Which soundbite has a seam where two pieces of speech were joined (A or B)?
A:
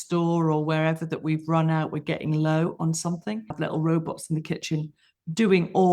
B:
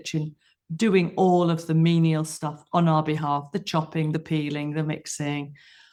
A